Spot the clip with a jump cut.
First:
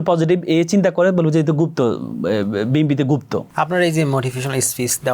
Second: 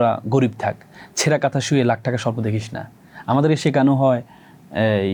first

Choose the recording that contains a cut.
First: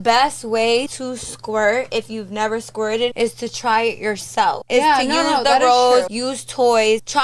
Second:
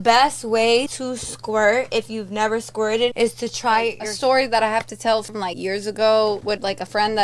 second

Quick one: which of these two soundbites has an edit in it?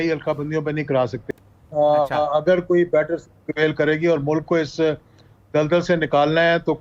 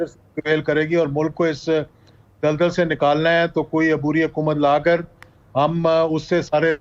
first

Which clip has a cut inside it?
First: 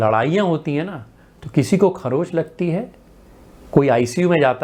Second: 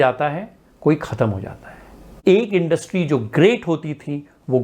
second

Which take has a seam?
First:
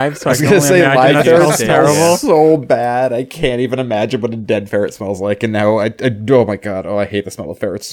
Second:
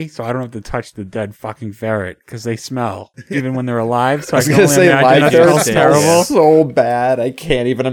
second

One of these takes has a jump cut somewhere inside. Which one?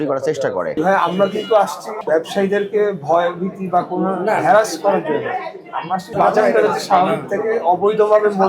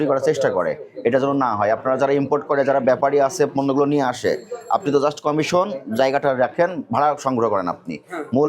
first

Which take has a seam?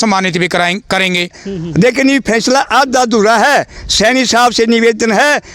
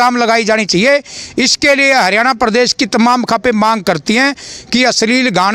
first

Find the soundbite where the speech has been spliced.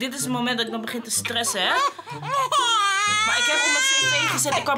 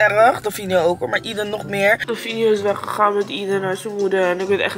second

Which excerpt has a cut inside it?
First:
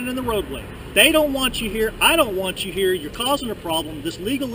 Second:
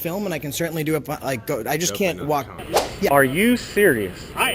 second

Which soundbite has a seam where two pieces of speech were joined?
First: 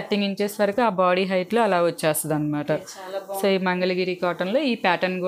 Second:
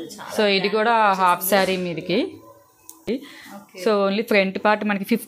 second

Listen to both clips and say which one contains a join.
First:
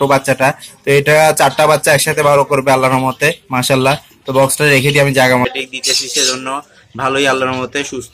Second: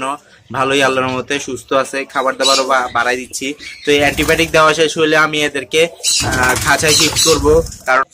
first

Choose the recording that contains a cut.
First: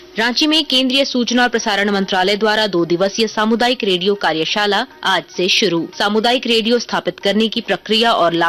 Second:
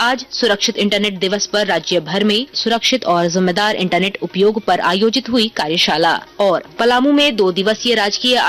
second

